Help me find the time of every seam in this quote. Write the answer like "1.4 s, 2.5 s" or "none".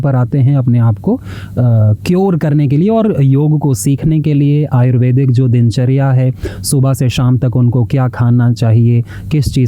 none